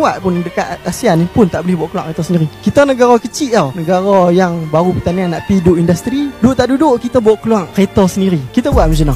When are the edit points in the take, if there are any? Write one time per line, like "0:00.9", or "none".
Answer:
none

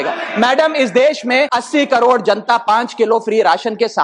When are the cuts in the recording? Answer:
0:01.6

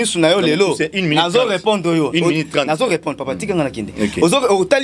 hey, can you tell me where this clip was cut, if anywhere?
none

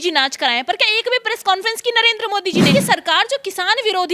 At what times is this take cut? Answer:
0:02.7

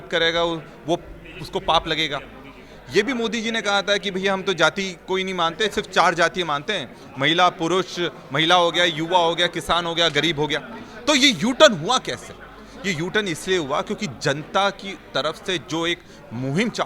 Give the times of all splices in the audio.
none

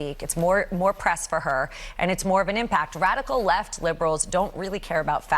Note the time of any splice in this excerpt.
0:02.9

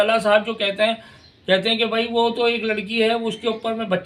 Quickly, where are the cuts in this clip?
none

